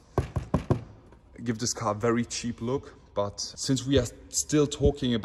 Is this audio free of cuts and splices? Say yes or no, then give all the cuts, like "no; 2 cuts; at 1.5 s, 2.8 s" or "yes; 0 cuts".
yes; 0 cuts